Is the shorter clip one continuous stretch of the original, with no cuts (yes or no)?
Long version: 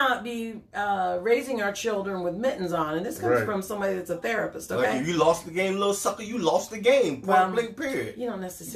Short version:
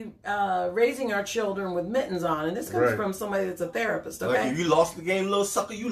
yes